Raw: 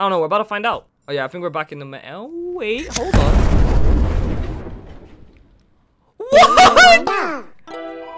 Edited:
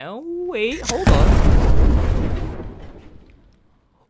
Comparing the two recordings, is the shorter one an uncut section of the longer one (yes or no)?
yes